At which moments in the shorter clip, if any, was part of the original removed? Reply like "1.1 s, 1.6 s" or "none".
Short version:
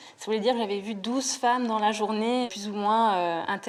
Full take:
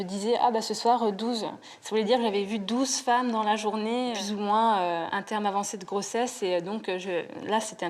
none